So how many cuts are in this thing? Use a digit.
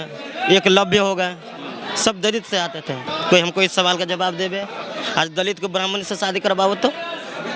1